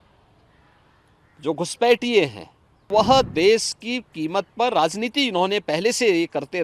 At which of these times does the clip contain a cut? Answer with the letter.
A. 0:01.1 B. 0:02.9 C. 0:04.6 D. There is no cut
B